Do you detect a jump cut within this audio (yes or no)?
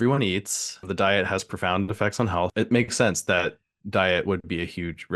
yes